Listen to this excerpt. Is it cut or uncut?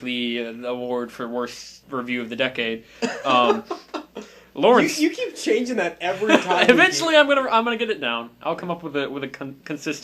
cut